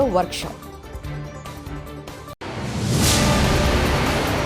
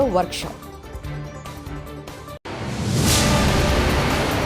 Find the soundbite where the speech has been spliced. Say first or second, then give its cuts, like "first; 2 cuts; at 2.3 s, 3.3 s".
first; 1 cut; at 2.4 s